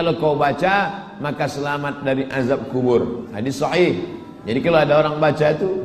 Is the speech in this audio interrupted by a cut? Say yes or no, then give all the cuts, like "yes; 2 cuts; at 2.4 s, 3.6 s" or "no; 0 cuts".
no; 0 cuts